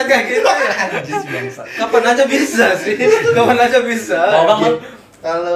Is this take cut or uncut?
uncut